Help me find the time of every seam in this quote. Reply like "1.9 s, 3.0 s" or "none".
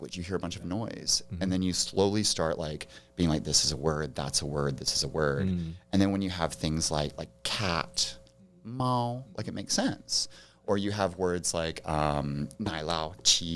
12.5 s